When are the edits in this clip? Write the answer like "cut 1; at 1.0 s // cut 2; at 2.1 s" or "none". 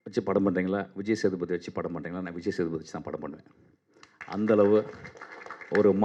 none